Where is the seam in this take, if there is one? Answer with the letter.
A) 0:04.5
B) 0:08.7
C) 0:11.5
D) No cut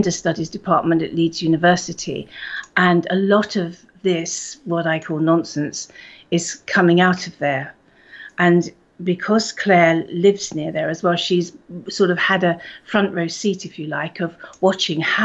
A